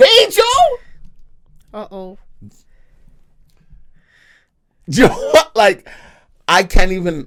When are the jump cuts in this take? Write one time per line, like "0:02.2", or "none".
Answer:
none